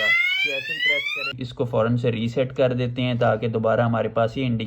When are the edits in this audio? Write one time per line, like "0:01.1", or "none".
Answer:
0:01.4